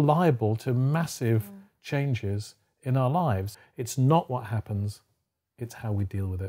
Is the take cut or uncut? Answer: cut